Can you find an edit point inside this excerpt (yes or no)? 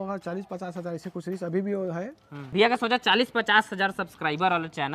yes